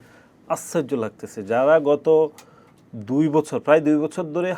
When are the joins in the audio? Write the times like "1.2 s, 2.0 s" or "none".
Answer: none